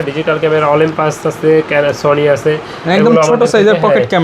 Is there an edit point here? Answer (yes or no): no